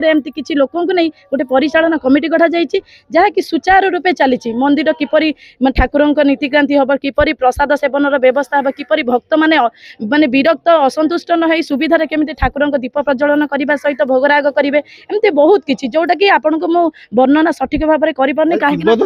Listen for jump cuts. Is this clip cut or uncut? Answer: uncut